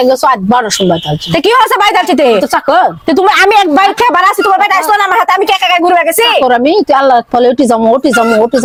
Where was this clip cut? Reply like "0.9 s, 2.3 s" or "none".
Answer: none